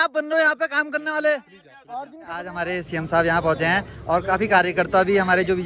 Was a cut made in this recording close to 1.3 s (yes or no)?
no